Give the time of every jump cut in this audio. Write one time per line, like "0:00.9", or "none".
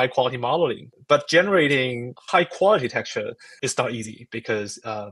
0:00.9
0:02.1
0:03.5